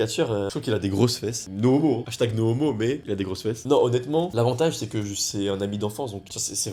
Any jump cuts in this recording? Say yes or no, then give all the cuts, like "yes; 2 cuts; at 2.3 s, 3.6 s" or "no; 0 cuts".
no; 0 cuts